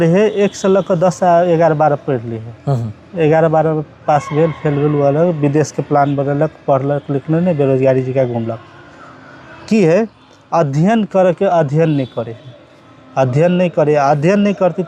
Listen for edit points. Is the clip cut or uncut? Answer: uncut